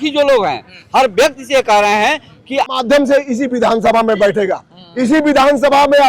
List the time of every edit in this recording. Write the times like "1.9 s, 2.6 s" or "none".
2.7 s